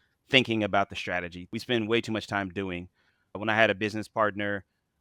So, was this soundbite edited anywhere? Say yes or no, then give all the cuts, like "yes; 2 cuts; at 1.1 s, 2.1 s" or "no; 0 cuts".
yes; 2 cuts; at 1.4 s, 3.1 s